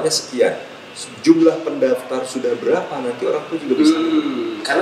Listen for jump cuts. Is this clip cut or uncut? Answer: uncut